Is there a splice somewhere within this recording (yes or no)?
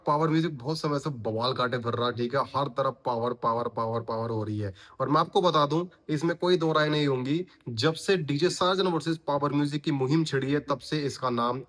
no